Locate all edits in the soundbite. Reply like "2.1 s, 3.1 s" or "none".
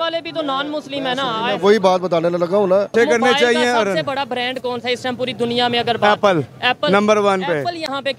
2.9 s